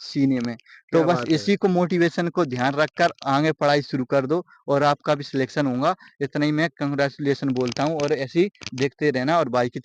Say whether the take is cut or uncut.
uncut